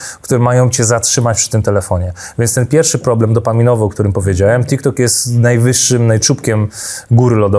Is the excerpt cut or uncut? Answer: uncut